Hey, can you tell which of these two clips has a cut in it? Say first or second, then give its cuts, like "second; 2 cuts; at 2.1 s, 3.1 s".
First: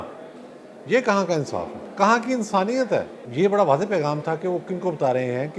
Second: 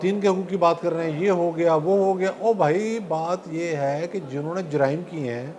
first; 2 cuts; at 1.8 s, 3.2 s